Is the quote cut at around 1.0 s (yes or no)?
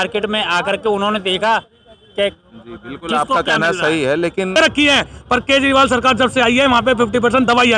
no